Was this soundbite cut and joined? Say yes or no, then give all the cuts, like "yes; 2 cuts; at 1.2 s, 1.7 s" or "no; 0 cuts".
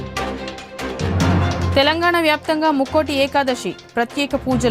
yes; 1 cut; at 1.7 s